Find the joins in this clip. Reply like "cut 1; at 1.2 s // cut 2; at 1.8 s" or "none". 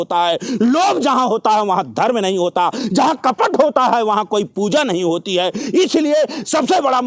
none